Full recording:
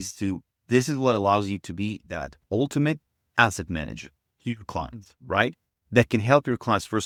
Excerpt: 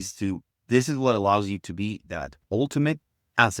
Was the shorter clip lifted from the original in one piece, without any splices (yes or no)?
yes